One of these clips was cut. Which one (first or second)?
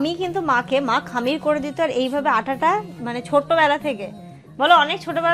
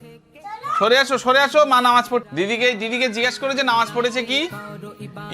second